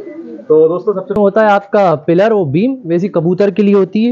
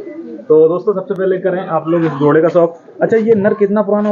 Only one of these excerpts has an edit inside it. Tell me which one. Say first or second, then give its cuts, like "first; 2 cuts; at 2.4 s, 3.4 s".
first; 1 cut; at 1.2 s